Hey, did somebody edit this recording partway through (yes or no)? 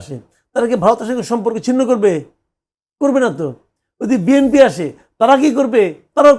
no